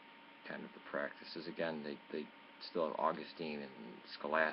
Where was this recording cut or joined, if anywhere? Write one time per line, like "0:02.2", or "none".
none

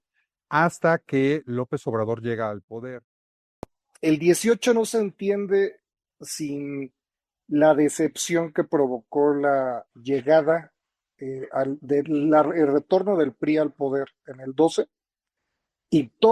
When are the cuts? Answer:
0:03.4

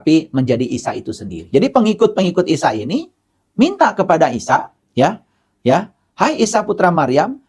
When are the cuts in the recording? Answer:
0:01.5

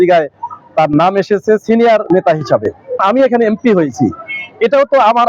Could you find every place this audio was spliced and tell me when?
0:03.0

